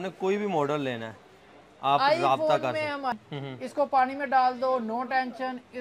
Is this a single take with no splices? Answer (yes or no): no